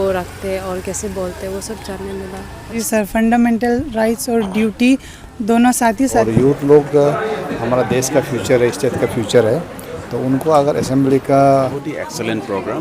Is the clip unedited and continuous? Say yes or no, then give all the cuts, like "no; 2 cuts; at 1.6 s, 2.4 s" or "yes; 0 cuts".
no; 3 cuts; at 2.8 s, 6.1 s, 11.6 s